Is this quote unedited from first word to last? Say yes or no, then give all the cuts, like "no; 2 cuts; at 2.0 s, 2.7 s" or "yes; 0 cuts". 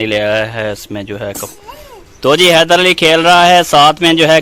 no; 1 cut; at 1.5 s